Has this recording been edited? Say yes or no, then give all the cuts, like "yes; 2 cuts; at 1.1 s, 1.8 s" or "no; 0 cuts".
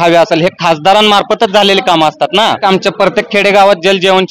yes; 1 cut; at 2.6 s